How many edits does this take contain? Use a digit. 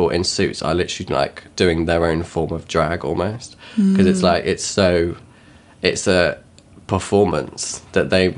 0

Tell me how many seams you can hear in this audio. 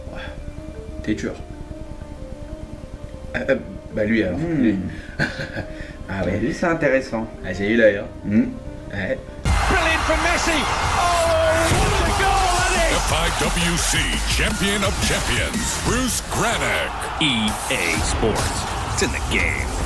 0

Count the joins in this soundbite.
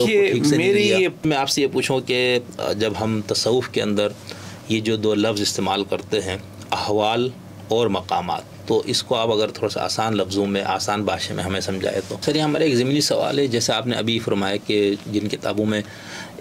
2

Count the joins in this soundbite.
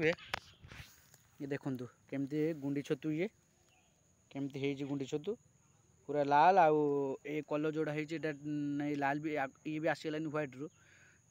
0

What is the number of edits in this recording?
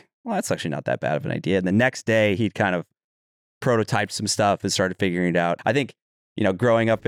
1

